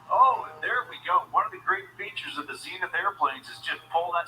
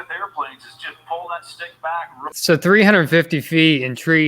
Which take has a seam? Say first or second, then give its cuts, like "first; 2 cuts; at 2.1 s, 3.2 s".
second; 1 cut; at 2.3 s